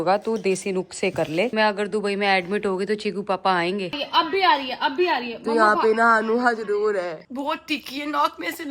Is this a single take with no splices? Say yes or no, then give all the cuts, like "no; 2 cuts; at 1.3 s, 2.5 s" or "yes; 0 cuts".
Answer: no; 3 cuts; at 1.5 s, 3.9 s, 7.2 s